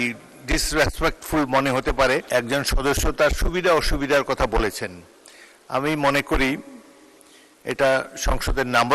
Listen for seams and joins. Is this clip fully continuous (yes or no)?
no